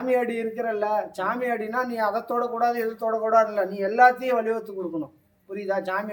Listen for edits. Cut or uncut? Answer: uncut